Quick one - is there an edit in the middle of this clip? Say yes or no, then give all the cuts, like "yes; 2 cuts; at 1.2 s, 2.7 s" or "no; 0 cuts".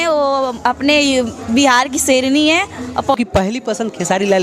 yes; 1 cut; at 3.1 s